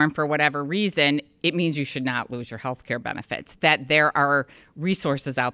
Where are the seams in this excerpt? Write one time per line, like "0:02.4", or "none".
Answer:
none